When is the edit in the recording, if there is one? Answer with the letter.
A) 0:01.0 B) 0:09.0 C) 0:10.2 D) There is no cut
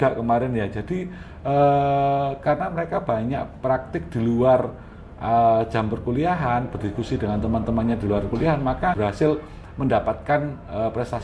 B